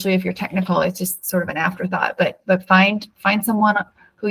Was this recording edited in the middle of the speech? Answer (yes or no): no